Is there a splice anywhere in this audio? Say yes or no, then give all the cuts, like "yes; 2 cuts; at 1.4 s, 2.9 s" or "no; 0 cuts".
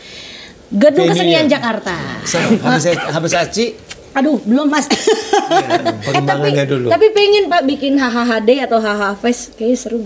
yes; 2 cuts; at 2.4 s, 6.0 s